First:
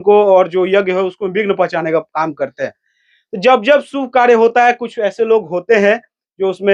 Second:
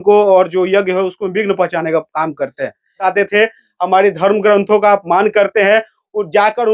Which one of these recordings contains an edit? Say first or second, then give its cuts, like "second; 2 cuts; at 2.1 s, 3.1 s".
second; 1 cut; at 3.0 s